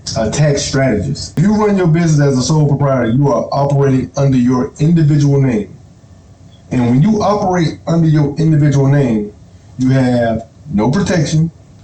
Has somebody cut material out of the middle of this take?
yes; 1 cut; at 1.4 s

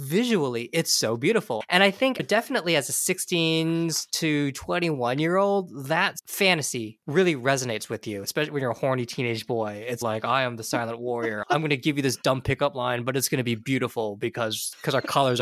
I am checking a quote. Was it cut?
yes; 2 cuts; at 1.6 s, 7.0 s

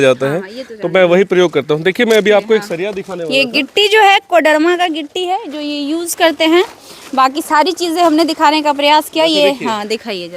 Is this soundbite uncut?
yes; 0 cuts

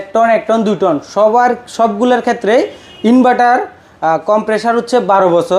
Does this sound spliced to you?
no; 0 cuts

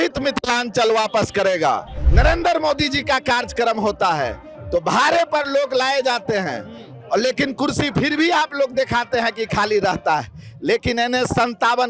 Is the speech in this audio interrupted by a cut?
yes; 1 cut; at 2.0 s

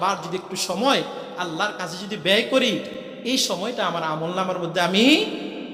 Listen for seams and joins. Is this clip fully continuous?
yes; 0 cuts

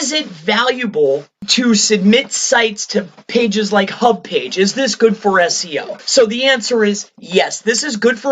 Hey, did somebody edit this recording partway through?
yes; 2 cuts; at 1.4 s, 6.0 s

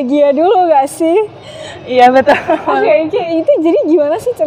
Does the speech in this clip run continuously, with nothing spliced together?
yes; 0 cuts

